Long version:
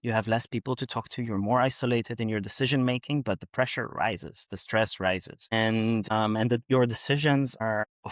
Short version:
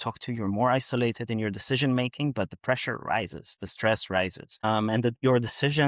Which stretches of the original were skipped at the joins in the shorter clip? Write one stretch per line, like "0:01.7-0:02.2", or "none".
0:05.5-0:06.0